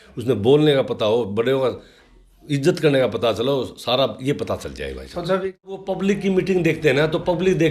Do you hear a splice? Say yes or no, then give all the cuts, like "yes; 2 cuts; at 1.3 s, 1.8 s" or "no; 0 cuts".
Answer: yes; 1 cut; at 5.8 s